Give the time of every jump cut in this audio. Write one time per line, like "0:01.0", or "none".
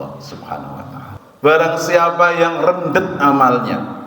0:01.2